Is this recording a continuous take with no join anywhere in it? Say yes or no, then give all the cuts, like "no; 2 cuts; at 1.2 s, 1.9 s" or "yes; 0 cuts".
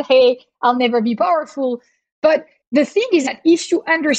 no; 1 cut; at 2.6 s